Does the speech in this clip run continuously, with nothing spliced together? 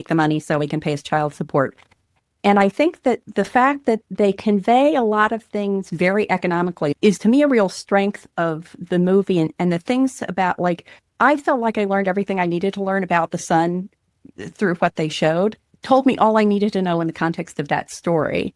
no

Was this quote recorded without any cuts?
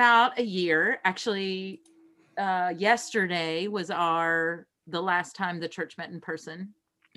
yes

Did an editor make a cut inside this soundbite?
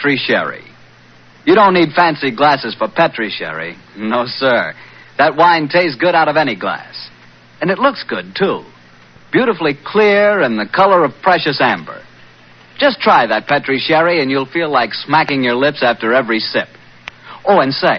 yes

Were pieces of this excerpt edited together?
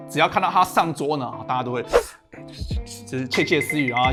no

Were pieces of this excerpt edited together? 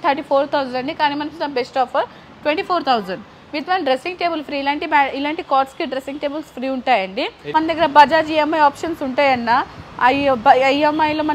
yes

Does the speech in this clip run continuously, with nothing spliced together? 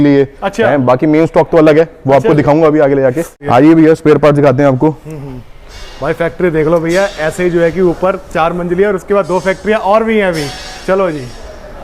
yes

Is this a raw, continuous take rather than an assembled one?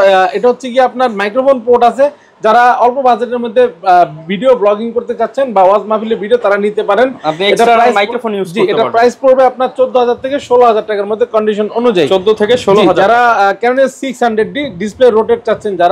yes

